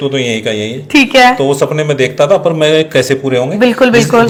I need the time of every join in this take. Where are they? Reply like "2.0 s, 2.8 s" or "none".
none